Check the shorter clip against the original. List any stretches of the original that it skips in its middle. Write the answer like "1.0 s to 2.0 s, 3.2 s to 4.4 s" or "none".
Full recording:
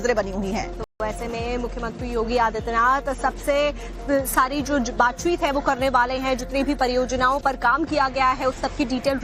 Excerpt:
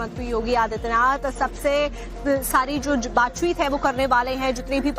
none